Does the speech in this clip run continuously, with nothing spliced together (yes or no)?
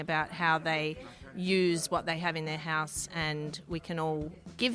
yes